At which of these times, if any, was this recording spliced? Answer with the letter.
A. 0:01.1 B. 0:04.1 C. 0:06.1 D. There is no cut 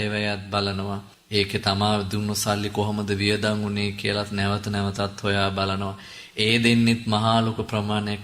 A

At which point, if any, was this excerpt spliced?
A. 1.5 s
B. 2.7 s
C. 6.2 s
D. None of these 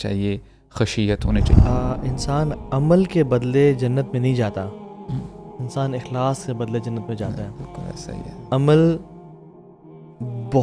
A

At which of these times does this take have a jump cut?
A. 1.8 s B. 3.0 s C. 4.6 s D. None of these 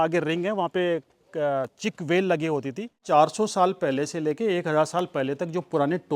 B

